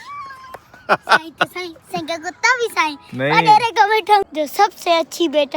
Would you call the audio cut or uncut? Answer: cut